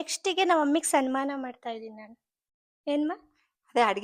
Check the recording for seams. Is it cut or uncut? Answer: uncut